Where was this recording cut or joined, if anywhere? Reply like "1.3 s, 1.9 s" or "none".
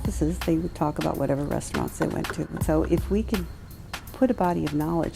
2.6 s